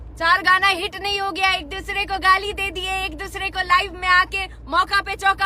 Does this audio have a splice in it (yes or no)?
no